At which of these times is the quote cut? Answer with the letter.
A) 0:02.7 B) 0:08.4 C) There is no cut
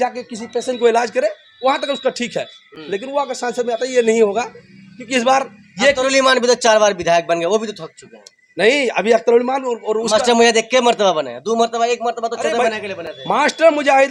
C